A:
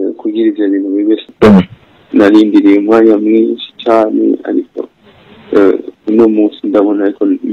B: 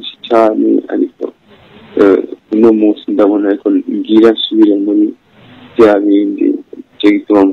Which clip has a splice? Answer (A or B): A